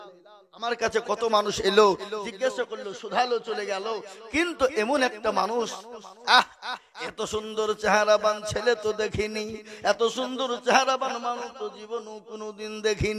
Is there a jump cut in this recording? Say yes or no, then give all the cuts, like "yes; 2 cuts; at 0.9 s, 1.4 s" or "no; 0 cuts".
no; 0 cuts